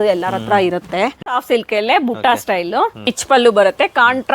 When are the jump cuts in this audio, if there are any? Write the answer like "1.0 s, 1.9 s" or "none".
1.2 s, 3.1 s